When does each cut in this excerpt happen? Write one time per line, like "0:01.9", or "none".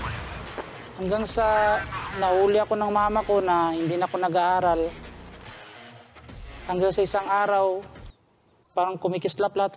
0:08.0